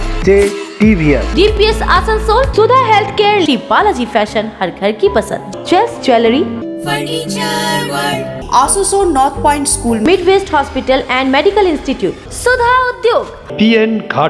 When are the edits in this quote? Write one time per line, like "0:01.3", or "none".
none

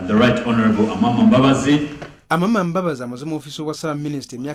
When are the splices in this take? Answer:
none

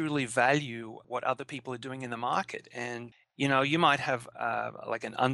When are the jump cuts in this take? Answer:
0:01.0
0:03.1
0:04.3

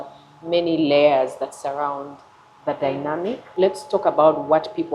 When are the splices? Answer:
0:03.4

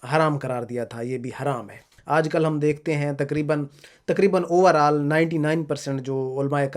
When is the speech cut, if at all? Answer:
0:01.9

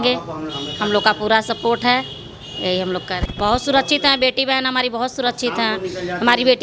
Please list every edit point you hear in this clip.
0:03.1

